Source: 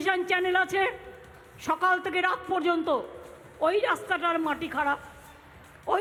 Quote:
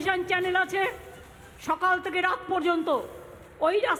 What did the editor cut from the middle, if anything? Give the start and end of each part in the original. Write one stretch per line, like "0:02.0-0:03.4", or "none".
none